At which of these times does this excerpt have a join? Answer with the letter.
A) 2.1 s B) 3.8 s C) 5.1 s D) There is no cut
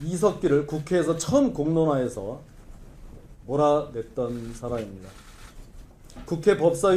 B